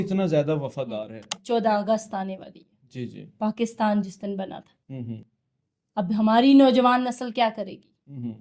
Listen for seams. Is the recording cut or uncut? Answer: cut